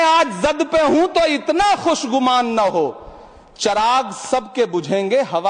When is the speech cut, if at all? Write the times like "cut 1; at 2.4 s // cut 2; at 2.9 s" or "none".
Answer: none